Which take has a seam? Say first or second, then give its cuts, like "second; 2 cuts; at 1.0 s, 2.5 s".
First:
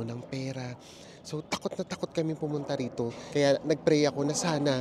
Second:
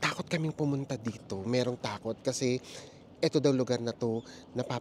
first; 1 cut; at 3.2 s